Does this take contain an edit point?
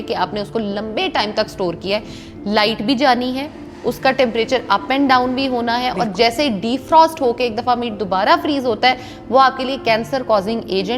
no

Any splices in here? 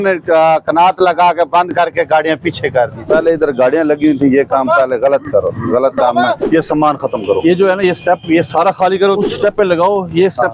yes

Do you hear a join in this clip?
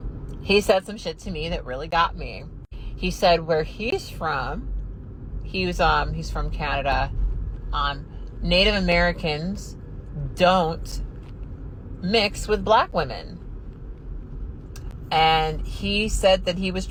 no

